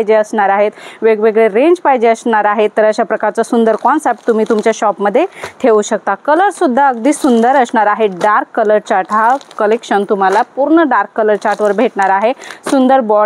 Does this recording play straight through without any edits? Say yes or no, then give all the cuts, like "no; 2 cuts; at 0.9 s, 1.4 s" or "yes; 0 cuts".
yes; 0 cuts